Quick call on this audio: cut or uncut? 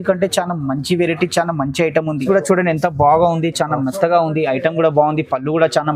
cut